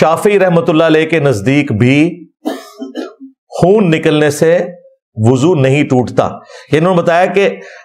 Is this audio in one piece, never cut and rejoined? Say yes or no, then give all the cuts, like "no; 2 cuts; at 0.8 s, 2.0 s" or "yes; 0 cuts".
yes; 0 cuts